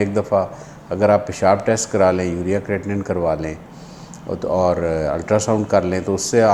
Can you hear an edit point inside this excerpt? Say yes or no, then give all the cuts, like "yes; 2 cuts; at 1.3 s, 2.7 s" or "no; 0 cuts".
no; 0 cuts